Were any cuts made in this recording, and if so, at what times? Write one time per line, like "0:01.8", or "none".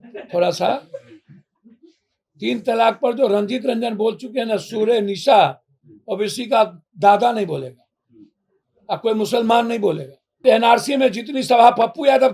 0:10.4